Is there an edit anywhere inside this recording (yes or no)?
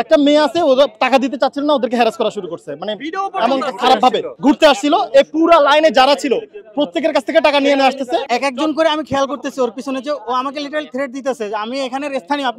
no